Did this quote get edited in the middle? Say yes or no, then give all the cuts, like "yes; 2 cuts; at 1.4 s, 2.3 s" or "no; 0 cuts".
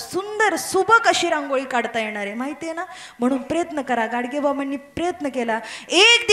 no; 0 cuts